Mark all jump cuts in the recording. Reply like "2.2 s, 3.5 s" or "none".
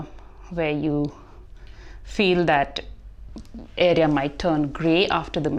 none